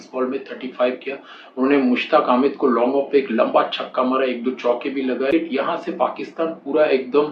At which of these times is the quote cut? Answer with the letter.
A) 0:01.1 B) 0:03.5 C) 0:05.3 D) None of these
C